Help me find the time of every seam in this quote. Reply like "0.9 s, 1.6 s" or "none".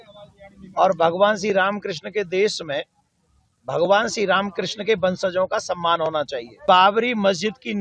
6.6 s